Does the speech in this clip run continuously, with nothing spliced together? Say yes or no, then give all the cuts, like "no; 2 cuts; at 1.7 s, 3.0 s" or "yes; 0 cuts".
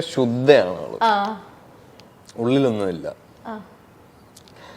yes; 0 cuts